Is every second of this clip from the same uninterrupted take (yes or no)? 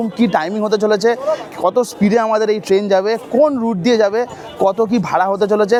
yes